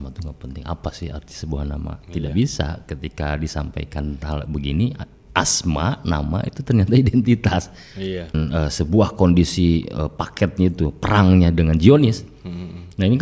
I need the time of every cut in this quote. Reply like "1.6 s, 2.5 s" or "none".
8.3 s